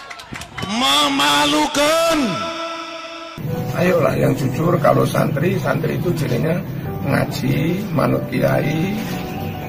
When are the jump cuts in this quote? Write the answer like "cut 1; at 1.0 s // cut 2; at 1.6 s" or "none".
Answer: cut 1; at 3.4 s